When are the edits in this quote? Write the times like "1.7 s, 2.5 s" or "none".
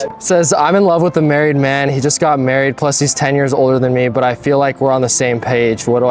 none